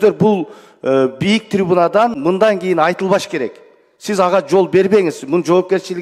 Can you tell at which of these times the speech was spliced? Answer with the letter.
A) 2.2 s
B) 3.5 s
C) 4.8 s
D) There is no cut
A